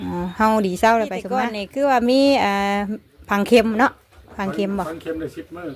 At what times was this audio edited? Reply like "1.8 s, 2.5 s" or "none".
1.6 s